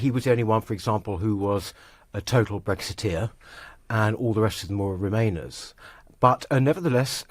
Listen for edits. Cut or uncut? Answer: cut